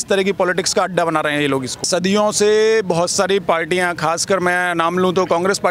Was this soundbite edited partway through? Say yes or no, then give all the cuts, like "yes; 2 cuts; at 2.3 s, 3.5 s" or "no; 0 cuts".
yes; 1 cut; at 1.9 s